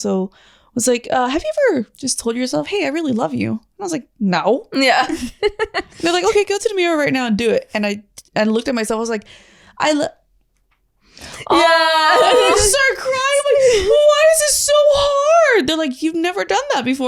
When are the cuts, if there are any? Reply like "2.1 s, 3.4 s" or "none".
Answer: none